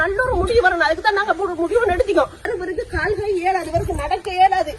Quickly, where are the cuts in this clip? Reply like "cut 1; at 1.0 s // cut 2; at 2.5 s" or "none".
cut 1; at 2.5 s